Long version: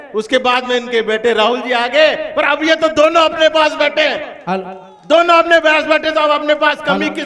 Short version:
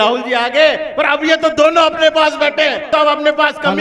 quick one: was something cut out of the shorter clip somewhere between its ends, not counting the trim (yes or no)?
yes